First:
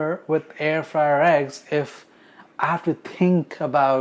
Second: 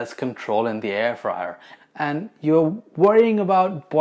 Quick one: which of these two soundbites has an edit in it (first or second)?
second